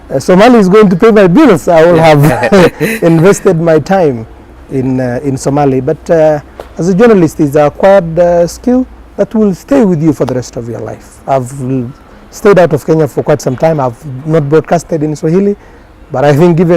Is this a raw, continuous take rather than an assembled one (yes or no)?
yes